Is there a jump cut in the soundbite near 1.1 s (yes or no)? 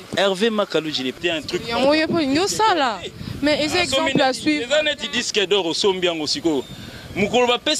yes